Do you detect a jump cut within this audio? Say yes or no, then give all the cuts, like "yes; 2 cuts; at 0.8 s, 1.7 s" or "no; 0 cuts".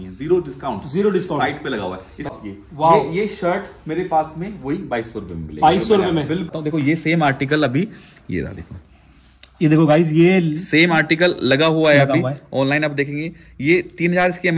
yes; 2 cuts; at 2.3 s, 6.5 s